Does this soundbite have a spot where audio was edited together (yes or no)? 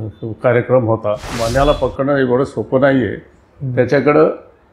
yes